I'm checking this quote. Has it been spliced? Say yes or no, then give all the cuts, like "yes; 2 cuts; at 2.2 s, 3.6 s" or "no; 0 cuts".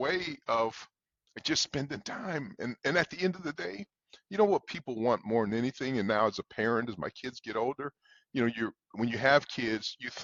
no; 0 cuts